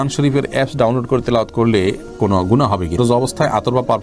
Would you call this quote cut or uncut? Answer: cut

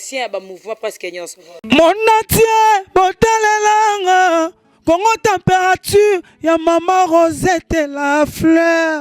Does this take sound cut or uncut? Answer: cut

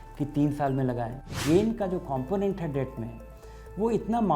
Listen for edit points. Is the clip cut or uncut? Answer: cut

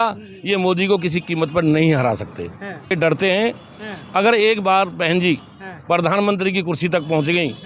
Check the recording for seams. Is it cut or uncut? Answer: cut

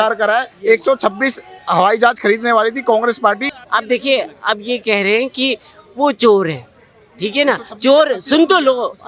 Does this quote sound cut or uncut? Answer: cut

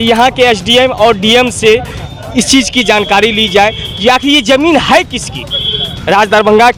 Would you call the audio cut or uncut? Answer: uncut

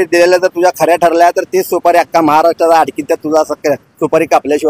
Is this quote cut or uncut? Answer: uncut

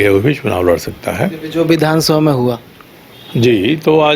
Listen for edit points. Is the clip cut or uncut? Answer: uncut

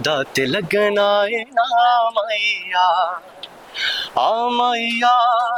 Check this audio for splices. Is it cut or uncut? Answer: uncut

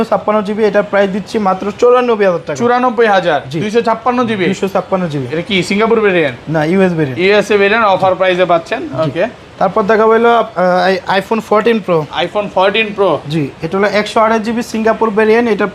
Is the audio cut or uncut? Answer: uncut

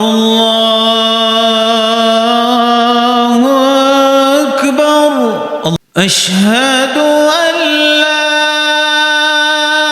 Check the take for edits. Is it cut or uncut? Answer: cut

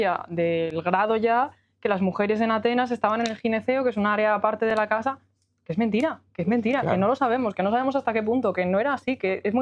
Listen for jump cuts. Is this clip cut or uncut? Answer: uncut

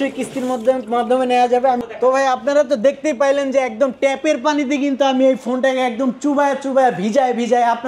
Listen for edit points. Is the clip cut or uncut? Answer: uncut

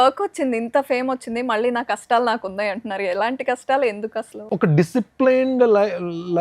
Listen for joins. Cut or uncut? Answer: uncut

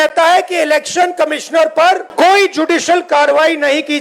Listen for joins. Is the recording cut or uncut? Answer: cut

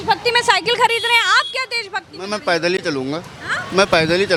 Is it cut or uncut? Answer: uncut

